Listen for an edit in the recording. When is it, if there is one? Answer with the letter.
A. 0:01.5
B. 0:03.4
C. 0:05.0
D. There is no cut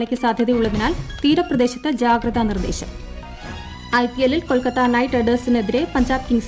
B